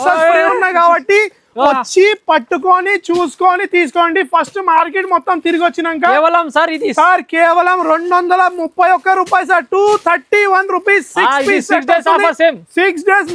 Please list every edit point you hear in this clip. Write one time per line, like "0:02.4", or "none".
none